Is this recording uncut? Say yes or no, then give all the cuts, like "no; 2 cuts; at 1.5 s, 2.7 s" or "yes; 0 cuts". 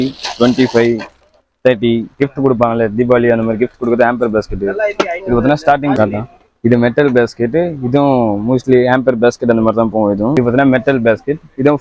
no; 3 cuts; at 2.1 s, 5.9 s, 10.3 s